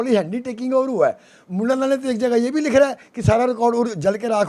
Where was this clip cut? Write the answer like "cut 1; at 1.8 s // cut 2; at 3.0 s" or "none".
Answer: none